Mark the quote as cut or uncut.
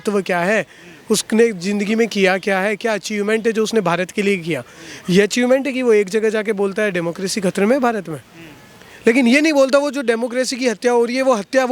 uncut